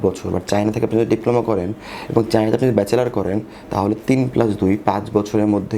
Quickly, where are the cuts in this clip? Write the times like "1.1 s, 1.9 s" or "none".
none